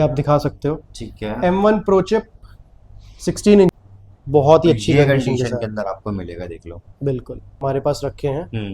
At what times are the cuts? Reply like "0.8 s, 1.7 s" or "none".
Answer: 3.8 s, 7.6 s